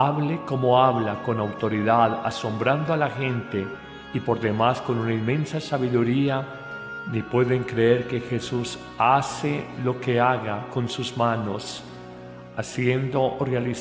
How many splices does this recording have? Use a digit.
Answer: 1